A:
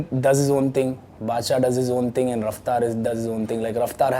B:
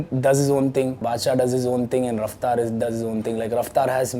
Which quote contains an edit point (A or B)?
B